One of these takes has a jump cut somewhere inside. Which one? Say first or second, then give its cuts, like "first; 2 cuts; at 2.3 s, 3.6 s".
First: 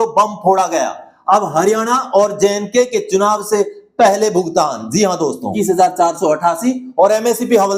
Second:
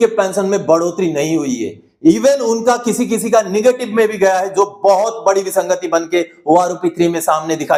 first; 1 cut; at 5.5 s